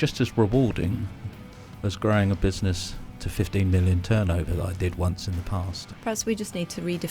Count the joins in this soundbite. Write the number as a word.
one